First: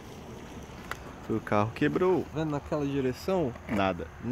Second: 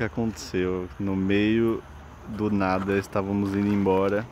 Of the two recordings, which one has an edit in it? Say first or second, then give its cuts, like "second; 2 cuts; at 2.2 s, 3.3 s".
first; 1 cut; at 2.3 s